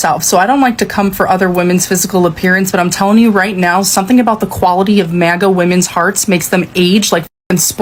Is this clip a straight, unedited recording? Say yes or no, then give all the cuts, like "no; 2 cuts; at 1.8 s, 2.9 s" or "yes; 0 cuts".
yes; 0 cuts